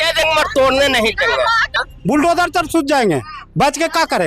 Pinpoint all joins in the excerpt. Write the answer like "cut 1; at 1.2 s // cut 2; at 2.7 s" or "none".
cut 1; at 1.7 s